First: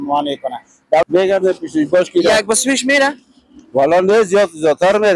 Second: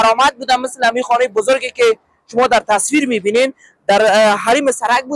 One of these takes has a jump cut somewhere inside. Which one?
first; 1 cut; at 1.0 s

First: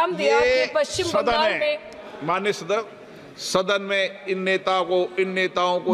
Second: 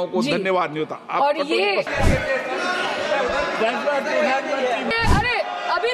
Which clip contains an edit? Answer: second; 2 cuts; at 1.9 s, 4.9 s

